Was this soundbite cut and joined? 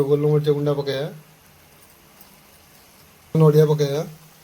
yes; 1 cut; at 3.4 s

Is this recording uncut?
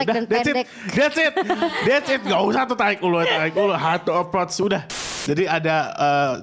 no; 1 cut; at 5.0 s

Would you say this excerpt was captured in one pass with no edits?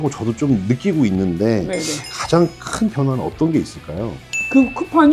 no; 1 cut; at 4.2 s

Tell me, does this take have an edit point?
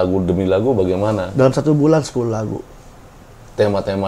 no; 0 cuts

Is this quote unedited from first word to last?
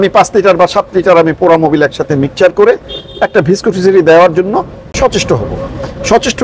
yes; 0 cuts

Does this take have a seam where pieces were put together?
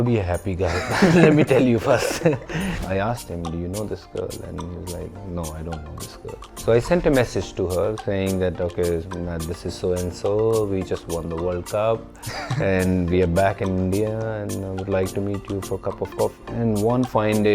yes; 3 cuts; at 2.8 s, 6.6 s, 16.4 s

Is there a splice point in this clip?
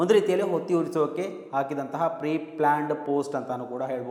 no; 0 cuts

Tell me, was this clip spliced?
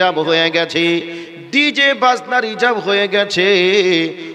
no; 0 cuts

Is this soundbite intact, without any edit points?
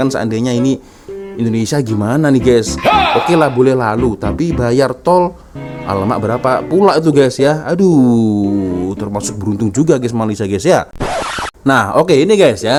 yes; 0 cuts

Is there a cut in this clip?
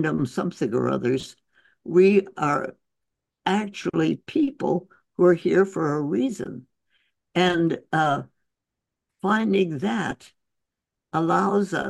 no; 0 cuts

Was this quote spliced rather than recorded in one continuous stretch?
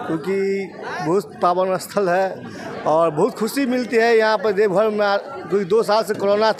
no; 0 cuts

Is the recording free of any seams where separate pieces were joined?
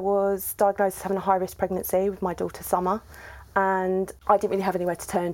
no; 1 cut; at 4.1 s

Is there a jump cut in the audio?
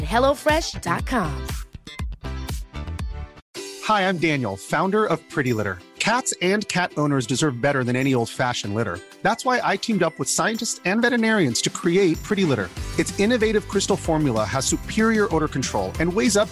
yes; 1 cut; at 3.4 s

